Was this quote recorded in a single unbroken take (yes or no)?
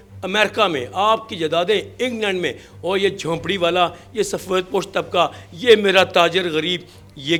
yes